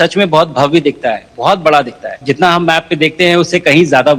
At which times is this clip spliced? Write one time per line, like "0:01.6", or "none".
0:02.2